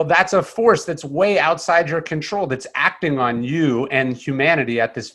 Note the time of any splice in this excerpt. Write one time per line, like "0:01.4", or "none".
none